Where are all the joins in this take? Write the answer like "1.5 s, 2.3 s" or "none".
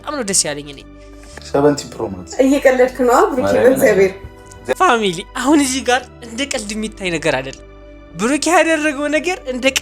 1.3 s